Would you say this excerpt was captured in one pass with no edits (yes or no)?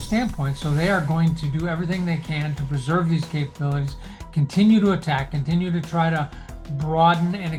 yes